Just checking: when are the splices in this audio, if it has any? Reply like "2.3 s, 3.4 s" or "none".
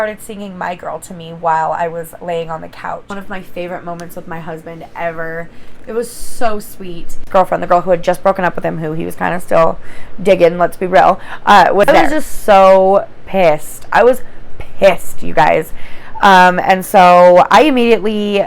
3.1 s, 7.2 s, 11.9 s